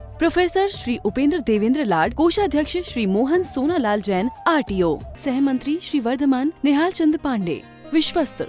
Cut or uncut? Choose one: uncut